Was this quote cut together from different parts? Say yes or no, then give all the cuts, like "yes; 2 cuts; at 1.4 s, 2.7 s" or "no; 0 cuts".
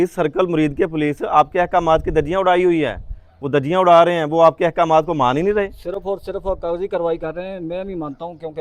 no; 0 cuts